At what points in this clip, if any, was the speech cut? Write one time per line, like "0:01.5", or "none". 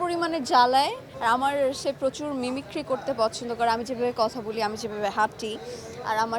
0:01.1